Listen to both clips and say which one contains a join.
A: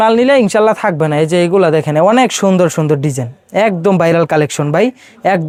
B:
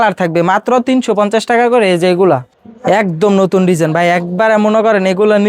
B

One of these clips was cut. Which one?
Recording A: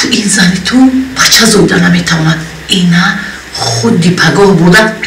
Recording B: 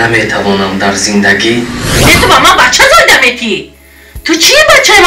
B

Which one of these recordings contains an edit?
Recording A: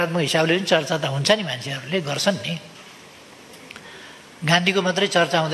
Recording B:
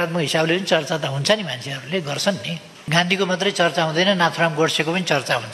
B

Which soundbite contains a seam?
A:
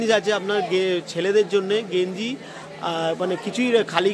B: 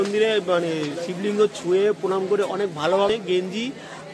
B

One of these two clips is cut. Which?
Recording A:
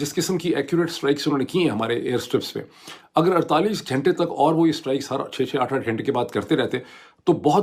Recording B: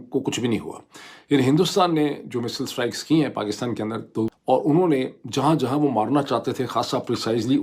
B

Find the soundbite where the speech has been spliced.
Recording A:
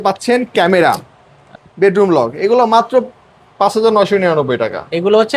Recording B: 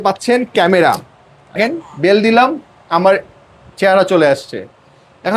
A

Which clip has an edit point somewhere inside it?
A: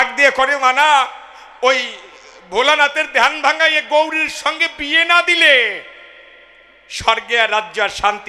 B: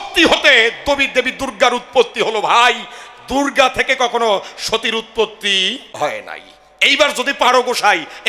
B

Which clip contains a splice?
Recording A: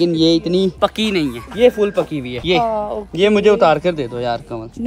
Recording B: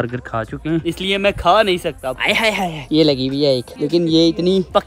B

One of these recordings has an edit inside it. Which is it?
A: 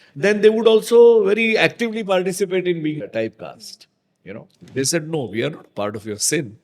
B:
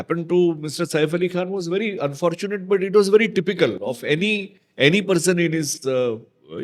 A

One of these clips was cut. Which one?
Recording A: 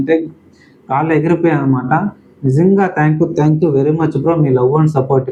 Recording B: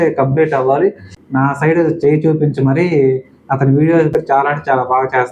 B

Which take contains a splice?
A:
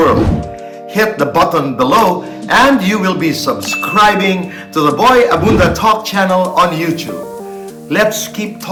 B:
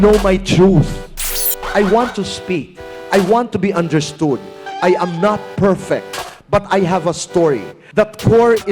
B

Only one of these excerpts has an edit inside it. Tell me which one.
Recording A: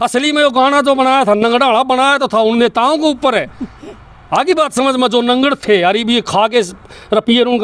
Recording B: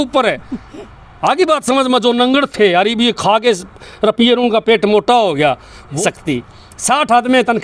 B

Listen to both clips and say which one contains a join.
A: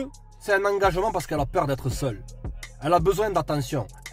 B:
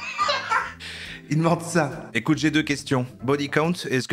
B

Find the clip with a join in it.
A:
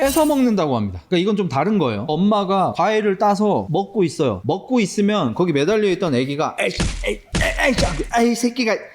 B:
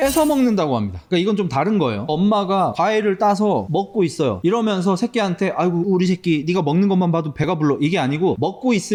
A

